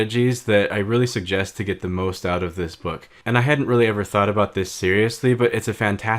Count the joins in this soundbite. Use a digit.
1